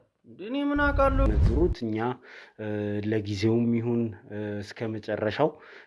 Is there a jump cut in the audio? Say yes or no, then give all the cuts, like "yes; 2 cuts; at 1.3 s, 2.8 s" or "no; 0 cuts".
yes; 1 cut; at 1.3 s